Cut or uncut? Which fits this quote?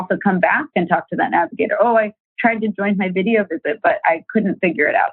uncut